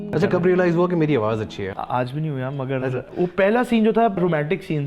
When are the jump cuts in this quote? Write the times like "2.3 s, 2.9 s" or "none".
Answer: 1.7 s, 3.0 s, 4.2 s